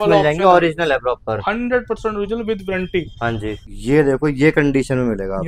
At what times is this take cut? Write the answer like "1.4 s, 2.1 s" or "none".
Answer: 3.7 s

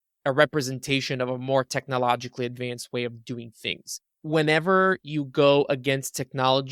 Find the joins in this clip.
4.1 s

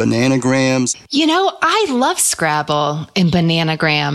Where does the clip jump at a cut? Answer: 1.0 s

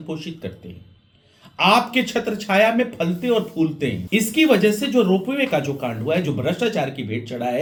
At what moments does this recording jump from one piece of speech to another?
none

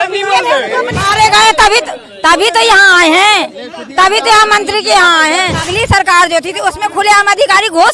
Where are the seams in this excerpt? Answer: 1.0 s, 5.6 s

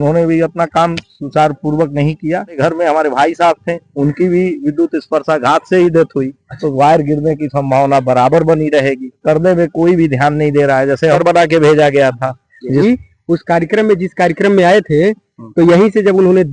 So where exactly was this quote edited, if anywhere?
2.6 s, 6.7 s, 9.1 s, 11.2 s, 12.8 s

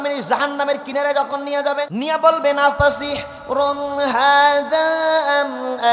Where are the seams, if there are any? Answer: 1.9 s

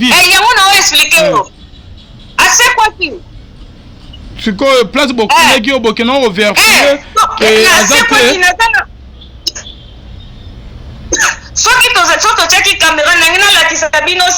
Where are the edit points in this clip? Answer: none

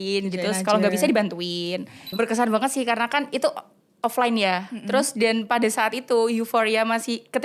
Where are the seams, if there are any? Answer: 2.1 s

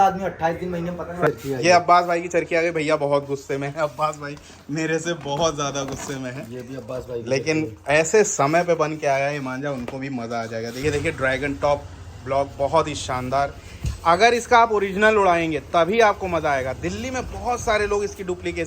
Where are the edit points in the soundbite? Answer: 1.3 s, 10.6 s

